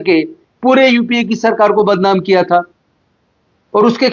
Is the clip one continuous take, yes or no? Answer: yes